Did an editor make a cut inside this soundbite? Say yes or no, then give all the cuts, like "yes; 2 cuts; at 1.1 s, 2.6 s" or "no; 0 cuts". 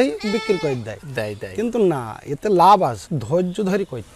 yes; 1 cut; at 3.1 s